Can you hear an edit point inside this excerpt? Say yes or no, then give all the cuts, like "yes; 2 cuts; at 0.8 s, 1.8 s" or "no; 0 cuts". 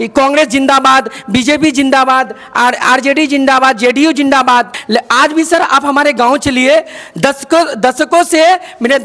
yes; 1 cut; at 4.8 s